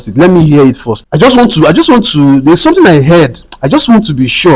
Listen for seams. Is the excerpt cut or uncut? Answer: cut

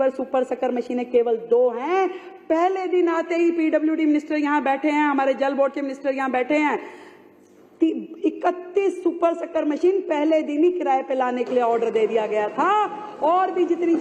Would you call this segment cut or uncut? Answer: uncut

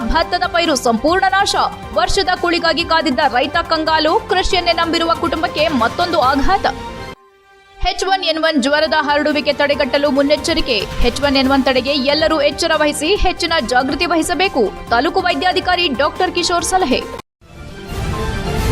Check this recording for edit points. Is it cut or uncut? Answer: cut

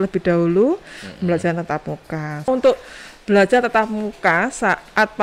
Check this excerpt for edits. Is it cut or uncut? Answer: cut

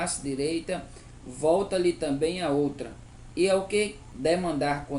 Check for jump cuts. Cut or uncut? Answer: cut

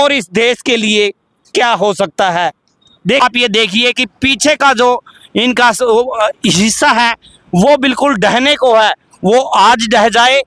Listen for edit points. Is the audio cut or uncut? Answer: cut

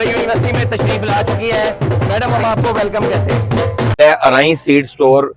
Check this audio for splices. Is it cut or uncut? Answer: cut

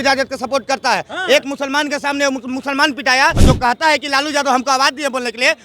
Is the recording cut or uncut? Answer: cut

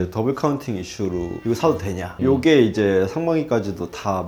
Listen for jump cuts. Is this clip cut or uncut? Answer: cut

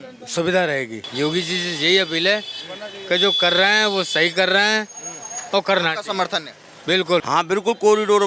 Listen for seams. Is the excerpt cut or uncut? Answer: cut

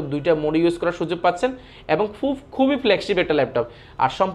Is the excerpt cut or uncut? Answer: uncut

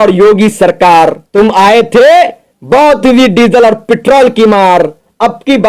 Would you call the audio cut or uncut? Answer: cut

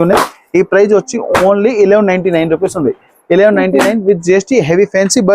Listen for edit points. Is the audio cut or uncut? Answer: uncut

